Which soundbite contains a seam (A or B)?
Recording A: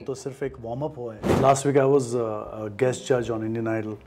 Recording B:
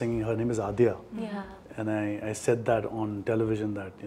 A